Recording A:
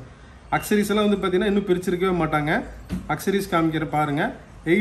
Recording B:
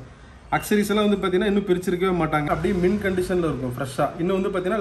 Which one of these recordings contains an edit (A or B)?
B